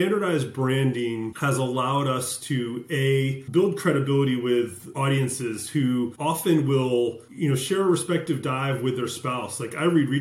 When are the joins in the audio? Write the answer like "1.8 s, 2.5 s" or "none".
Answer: 1.3 s, 3.4 s, 4.9 s, 6.1 s, 7.3 s